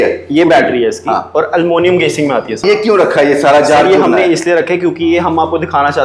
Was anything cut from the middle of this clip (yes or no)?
yes